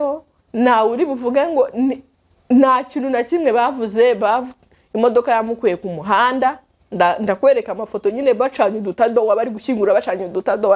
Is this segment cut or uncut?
uncut